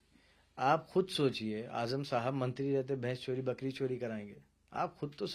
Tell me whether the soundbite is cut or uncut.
uncut